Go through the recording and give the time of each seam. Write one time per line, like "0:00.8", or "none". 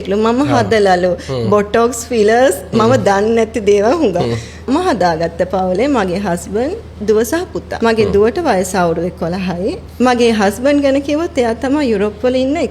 0:04.7
0:07.6
0:09.8